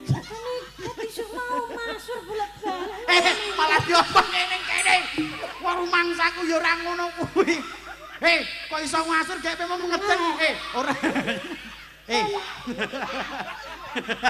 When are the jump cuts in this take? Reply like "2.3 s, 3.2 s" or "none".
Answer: none